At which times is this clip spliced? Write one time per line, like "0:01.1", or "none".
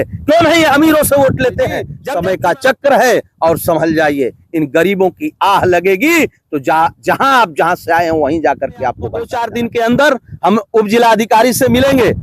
0:01.9
0:09.4